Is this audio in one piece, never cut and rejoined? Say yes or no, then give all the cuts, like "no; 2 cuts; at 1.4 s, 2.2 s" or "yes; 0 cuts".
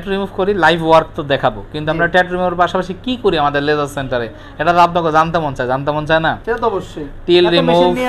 yes; 0 cuts